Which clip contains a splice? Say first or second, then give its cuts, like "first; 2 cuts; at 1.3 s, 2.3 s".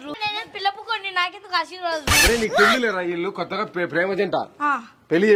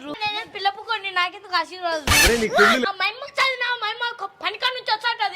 second; 1 cut; at 2.8 s